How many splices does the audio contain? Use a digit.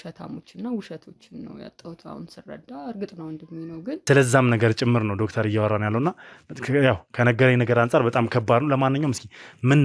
1